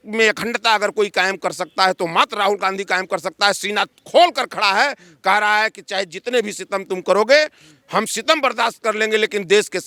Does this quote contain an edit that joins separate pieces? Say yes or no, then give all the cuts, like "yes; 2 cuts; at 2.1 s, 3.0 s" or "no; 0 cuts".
no; 0 cuts